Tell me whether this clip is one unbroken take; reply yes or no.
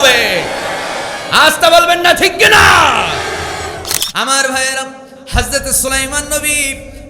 no